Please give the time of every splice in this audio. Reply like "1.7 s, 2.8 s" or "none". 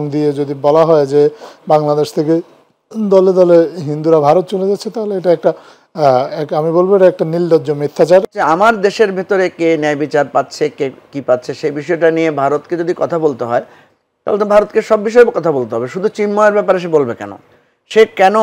8.3 s